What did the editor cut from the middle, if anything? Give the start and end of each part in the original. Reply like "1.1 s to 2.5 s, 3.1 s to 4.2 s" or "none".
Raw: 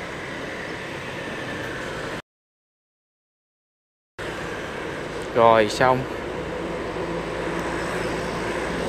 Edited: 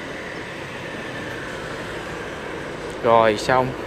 2.2 s to 4.2 s